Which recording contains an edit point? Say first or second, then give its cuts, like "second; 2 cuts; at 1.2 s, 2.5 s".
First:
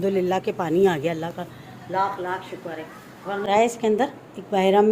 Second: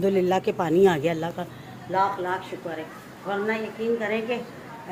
first; 1 cut; at 3.4 s